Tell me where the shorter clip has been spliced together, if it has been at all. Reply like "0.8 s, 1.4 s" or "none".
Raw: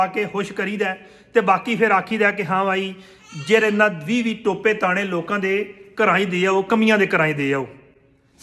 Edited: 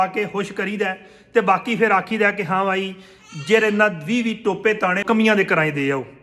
5.0 s